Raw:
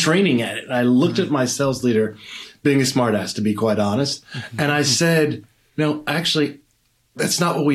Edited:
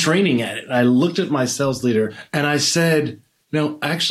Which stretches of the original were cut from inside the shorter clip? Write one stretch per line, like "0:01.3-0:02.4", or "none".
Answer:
0:02.2-0:04.5